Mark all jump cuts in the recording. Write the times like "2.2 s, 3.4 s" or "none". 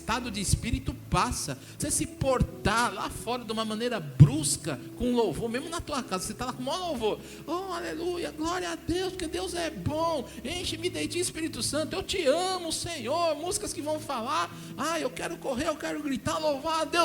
1.8 s